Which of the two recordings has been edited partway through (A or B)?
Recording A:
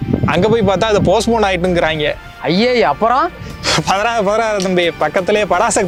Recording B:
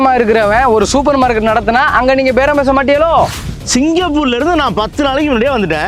B